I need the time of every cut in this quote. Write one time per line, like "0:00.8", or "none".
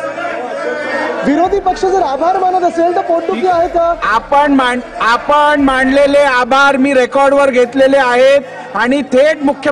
none